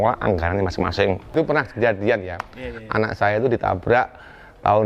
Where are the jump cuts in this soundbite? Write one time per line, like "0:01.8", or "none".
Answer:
0:01.3

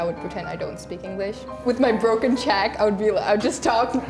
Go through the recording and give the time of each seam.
0:01.5

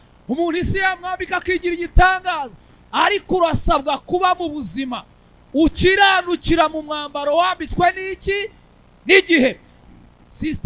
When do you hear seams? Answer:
0:09.7

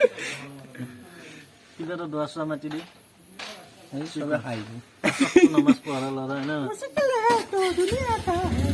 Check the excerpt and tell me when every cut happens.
0:06.8

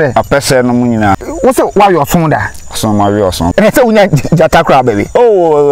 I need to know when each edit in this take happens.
0:01.2
0:03.5

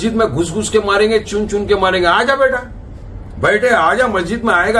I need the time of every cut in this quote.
none

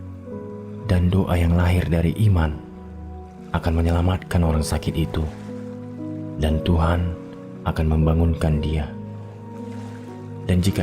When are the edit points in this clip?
0:08.8
0:10.1

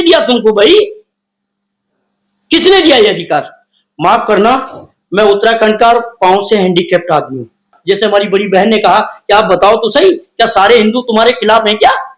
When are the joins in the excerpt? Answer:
0:07.7

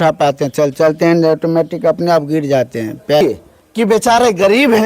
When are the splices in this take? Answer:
0:03.2

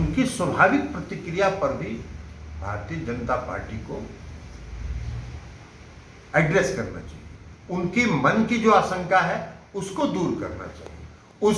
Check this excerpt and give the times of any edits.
none

